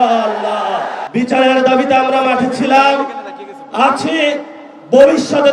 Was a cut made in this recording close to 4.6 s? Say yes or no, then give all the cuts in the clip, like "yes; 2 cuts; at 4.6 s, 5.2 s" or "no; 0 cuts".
no; 1 cut; at 1.0 s